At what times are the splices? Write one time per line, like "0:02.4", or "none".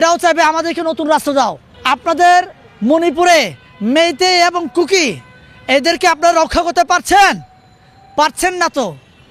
0:01.7